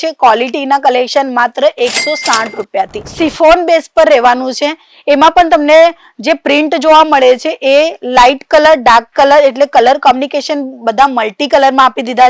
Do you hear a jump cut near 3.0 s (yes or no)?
yes